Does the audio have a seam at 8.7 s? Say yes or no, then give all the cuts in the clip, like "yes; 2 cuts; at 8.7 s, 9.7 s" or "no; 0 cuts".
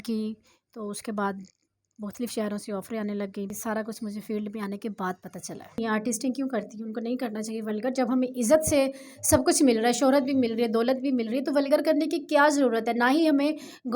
no; 2 cuts; at 3.6 s, 5.8 s